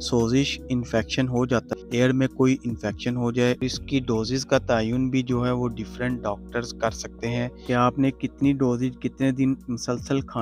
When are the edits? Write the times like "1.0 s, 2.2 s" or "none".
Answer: 1.8 s, 3.6 s